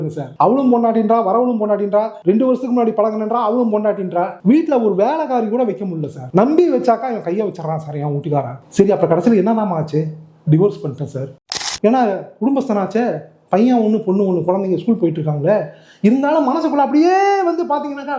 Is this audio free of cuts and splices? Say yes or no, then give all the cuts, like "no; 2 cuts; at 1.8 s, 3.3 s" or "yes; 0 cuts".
no; 1 cut; at 11.5 s